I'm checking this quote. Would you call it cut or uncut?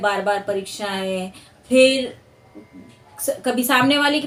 uncut